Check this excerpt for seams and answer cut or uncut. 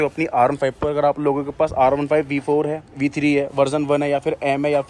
uncut